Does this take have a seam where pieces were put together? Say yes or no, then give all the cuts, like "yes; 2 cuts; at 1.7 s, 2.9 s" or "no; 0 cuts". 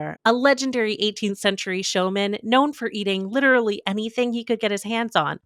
no; 0 cuts